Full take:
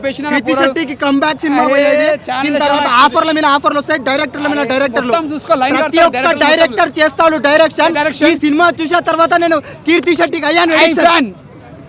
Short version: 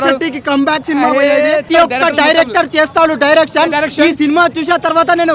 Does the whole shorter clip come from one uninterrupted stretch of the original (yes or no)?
no